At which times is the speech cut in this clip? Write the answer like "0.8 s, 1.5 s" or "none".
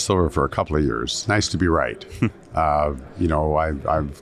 1.2 s